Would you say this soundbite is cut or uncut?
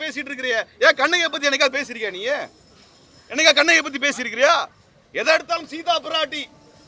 uncut